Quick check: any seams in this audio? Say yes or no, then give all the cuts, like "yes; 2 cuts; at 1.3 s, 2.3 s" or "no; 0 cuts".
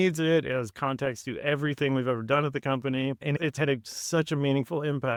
no; 0 cuts